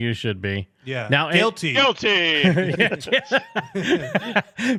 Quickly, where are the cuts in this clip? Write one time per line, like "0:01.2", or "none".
none

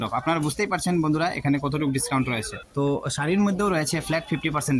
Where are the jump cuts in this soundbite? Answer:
none

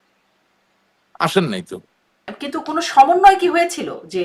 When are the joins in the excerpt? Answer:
0:02.3

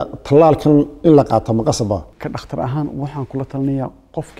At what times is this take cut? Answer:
0:02.1

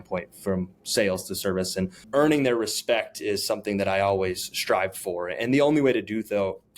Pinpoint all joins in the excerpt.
0:02.0

